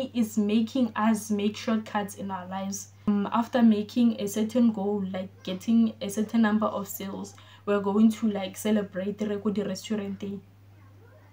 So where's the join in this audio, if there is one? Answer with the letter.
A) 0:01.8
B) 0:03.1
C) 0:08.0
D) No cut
B